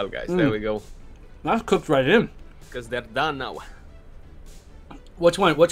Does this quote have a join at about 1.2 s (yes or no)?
no